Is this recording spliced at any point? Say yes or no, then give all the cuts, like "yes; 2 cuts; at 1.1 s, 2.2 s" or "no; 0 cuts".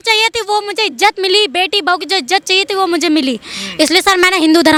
no; 0 cuts